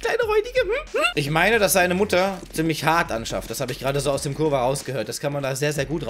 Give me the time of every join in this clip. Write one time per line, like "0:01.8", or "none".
0:01.1